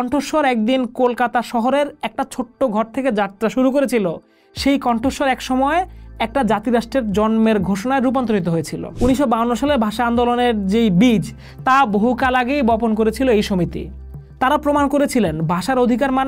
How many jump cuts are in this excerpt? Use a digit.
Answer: 1